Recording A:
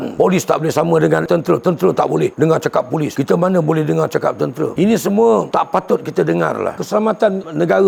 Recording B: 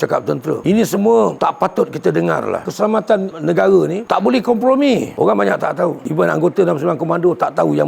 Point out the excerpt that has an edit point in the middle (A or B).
B